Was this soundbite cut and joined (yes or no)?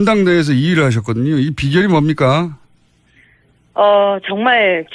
no